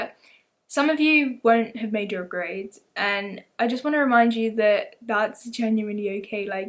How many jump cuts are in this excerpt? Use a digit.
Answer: 0